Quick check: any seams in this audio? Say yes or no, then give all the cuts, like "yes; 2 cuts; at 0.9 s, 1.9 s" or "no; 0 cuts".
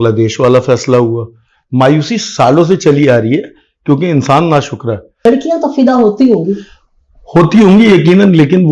yes; 1 cut; at 5.2 s